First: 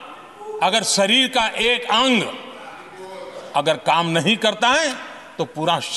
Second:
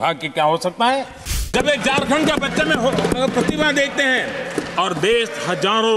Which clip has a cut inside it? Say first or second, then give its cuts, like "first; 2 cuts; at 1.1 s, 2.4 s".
second; 1 cut; at 1.5 s